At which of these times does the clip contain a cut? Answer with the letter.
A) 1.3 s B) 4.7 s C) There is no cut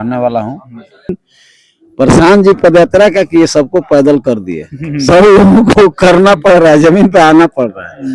A